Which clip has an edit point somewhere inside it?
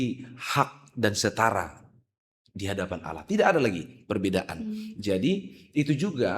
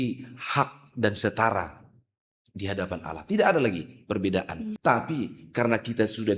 second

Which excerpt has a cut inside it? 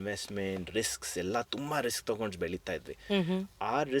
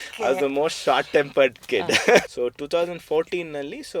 second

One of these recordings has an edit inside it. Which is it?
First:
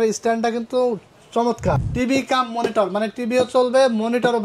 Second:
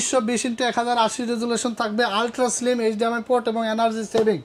first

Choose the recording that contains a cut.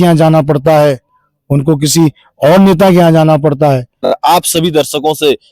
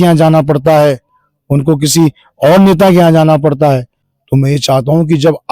first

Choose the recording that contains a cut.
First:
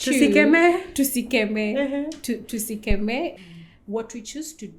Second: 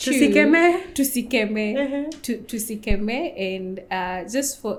first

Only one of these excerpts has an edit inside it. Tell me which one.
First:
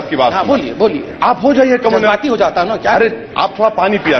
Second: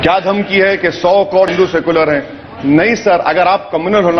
second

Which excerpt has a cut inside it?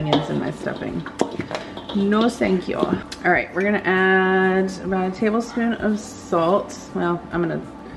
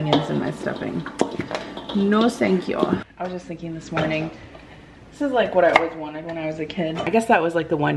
second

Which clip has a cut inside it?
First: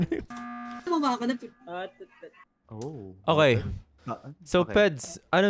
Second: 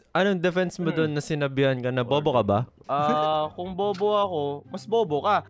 second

